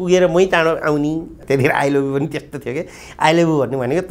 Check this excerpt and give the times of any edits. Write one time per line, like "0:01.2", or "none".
0:01.4

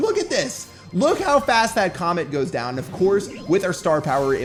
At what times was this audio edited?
none

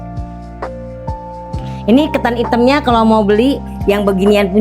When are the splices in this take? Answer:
0:01.8

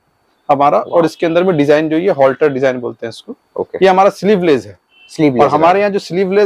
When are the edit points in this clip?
none

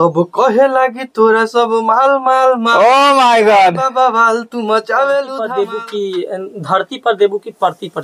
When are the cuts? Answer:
0:05.4

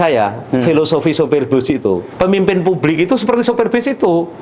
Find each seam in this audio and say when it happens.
0:02.1

